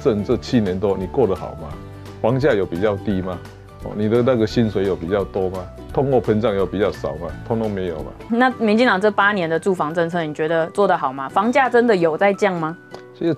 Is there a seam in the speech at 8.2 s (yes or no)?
yes